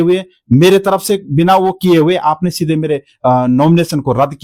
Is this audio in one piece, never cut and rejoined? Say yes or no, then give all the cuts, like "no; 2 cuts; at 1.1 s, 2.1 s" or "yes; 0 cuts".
yes; 0 cuts